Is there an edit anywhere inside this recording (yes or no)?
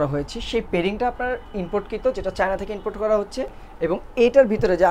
no